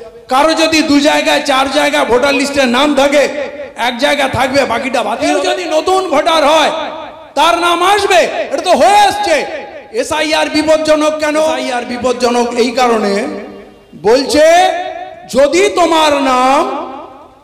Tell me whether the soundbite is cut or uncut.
cut